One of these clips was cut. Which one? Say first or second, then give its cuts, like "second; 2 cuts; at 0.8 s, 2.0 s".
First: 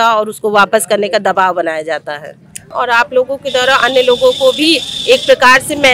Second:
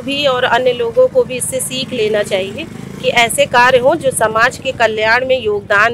first; 1 cut; at 2.7 s